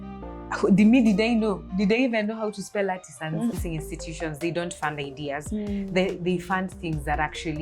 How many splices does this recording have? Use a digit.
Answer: 1